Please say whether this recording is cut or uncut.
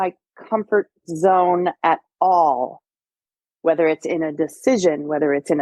uncut